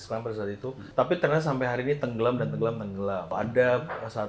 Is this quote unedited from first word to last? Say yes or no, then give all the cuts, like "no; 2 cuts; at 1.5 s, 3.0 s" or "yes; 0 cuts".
no; 2 cuts; at 0.8 s, 3.3 s